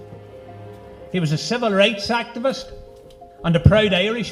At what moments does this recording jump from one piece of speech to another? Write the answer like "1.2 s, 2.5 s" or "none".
3.2 s

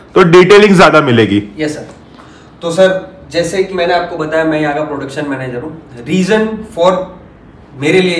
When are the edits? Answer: none

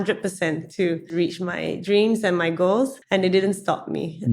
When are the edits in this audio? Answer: 1.1 s, 3.0 s

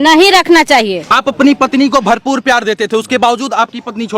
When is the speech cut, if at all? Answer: 1.0 s

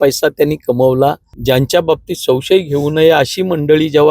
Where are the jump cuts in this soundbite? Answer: 1.3 s

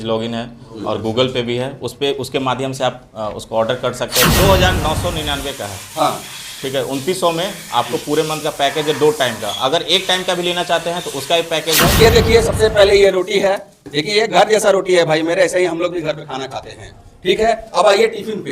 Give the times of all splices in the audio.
4.3 s, 11.9 s

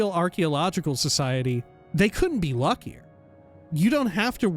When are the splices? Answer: 1.8 s, 3.6 s

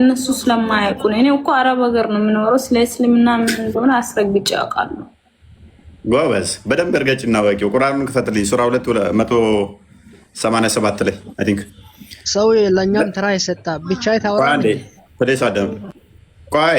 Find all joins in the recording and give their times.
none

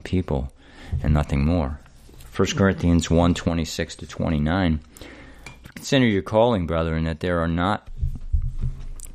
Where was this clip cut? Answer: 7.9 s

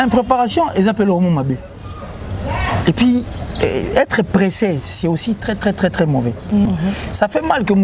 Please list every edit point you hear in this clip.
6.6 s

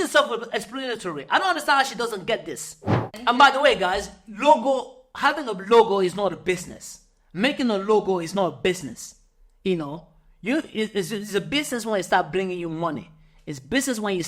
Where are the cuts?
3.1 s

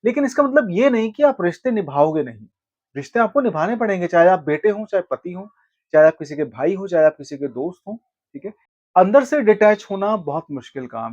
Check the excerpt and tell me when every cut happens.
8.7 s

